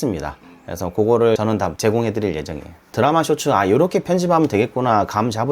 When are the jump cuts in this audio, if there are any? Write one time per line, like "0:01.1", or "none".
0:01.4
0:02.9